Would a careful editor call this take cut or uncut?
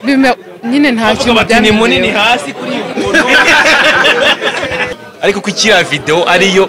cut